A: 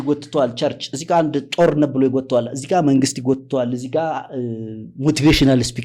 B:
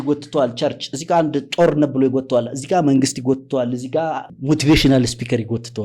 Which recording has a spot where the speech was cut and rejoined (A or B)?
B